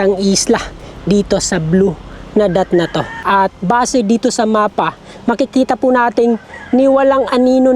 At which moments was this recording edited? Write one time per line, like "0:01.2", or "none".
0:03.2